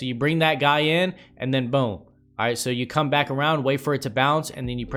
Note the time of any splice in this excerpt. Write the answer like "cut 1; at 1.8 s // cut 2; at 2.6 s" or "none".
none